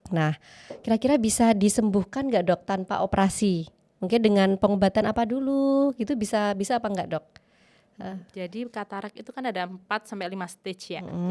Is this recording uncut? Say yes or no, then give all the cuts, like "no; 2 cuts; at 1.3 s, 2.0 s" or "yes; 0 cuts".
yes; 0 cuts